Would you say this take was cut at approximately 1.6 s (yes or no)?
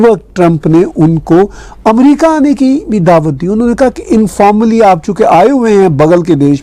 no